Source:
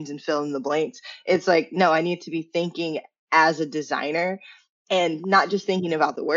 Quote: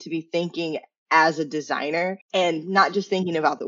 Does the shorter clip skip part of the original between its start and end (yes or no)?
yes